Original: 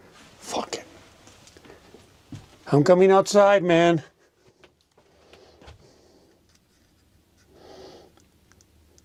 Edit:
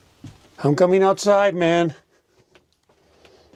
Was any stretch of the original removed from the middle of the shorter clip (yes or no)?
no